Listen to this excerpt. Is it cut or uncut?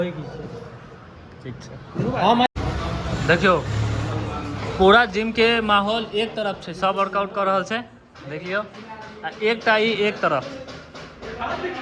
cut